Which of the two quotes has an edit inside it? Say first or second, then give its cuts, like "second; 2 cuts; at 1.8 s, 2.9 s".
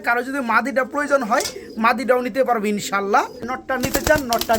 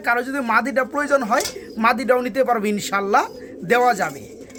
first; 1 cut; at 3.6 s